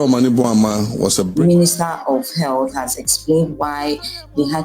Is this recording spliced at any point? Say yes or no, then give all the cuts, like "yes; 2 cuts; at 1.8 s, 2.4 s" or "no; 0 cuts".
yes; 1 cut; at 1.3 s